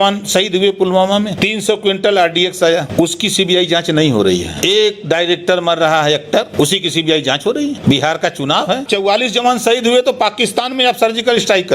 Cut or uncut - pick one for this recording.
cut